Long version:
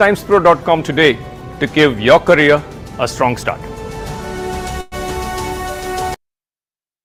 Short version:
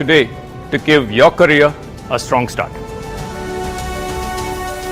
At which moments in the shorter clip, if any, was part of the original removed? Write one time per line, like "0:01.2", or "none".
0:03.9